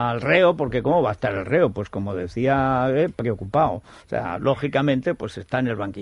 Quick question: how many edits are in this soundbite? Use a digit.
1